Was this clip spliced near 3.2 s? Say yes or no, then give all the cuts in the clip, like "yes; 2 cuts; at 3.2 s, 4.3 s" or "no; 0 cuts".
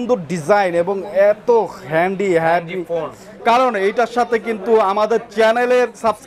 yes; 1 cut; at 3.2 s